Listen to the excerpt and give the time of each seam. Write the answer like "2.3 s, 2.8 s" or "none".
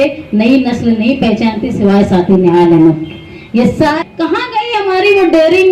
4.0 s